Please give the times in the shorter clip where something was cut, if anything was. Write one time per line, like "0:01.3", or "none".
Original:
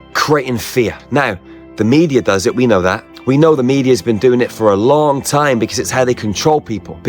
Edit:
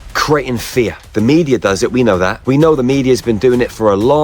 0:01.0
0:02.3